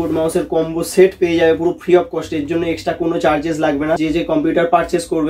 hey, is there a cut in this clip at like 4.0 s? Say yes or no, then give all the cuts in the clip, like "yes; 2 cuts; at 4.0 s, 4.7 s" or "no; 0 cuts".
yes; 1 cut; at 4.0 s